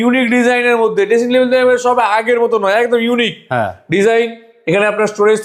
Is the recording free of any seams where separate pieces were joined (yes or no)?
yes